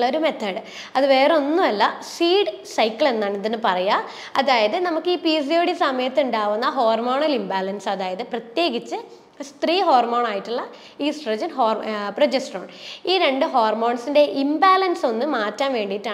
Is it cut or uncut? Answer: uncut